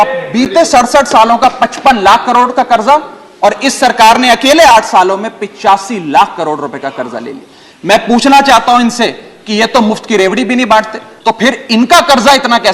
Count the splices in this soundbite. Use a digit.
1